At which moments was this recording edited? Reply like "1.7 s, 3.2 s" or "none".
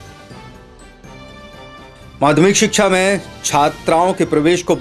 1.8 s